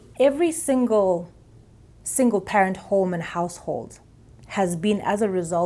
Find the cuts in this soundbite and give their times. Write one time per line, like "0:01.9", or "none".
none